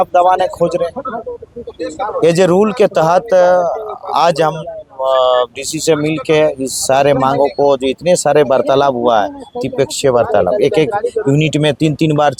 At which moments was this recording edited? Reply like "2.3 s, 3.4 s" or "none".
none